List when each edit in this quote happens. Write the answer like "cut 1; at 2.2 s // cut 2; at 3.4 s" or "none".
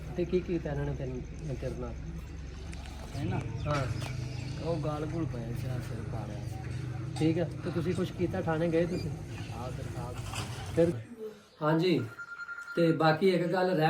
cut 1; at 11.0 s